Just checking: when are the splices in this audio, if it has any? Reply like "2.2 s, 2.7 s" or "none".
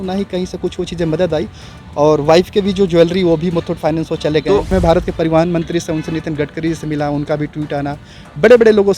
4.7 s